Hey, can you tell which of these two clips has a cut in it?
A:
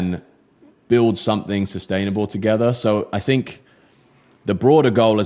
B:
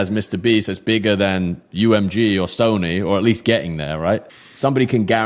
B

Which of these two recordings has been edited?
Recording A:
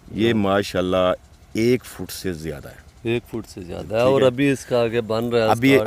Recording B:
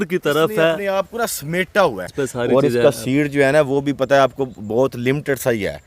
B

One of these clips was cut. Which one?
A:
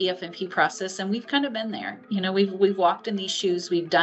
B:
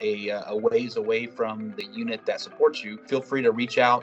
B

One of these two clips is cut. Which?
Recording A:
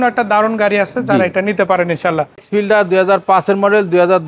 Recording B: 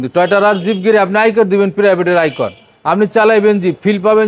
A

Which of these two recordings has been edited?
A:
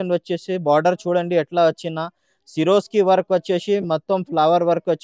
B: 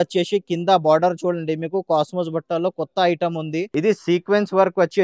B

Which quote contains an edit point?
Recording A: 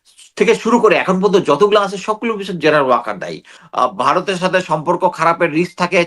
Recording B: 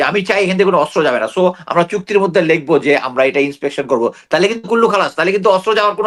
A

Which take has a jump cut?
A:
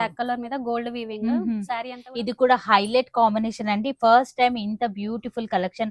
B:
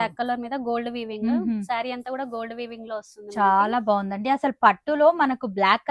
A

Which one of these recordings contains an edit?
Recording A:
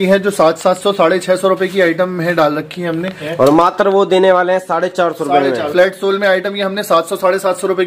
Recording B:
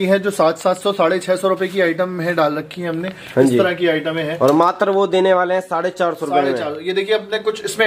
A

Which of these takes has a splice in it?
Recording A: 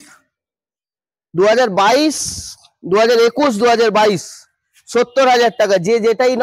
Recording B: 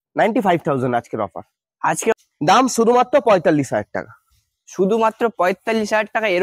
B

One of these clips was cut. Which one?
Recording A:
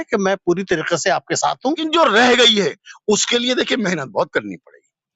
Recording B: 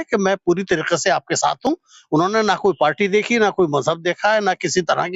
A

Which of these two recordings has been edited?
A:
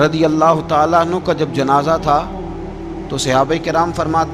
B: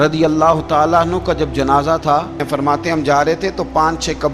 B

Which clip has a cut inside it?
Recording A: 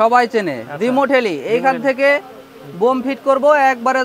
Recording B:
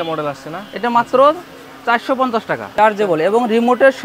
B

